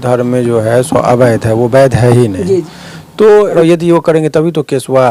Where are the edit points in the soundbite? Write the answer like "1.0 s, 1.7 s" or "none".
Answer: 3.6 s